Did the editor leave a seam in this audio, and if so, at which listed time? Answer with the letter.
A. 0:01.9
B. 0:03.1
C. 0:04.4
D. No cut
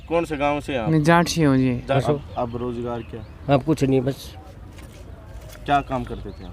A